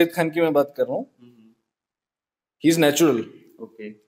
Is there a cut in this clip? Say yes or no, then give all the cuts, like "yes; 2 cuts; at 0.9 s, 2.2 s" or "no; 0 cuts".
no; 0 cuts